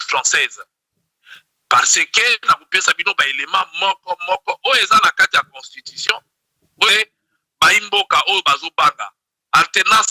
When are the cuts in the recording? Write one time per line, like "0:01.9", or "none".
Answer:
0:06.9